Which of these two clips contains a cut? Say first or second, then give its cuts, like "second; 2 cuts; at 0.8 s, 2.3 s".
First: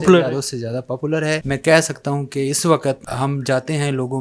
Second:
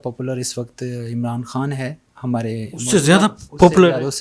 first; 2 cuts; at 1.5 s, 3.1 s